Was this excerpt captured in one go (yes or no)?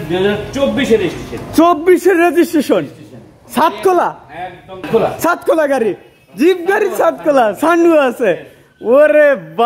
no